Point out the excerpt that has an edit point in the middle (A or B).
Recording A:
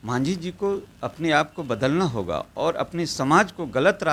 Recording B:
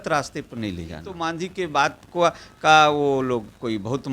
B